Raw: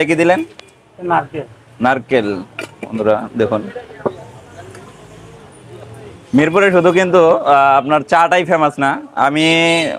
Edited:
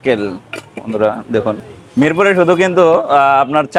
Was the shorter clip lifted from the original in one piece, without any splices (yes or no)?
no